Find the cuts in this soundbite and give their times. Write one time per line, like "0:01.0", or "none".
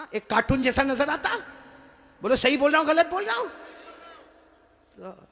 none